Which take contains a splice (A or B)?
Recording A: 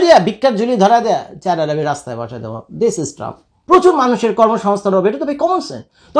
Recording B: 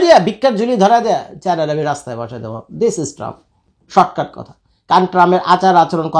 A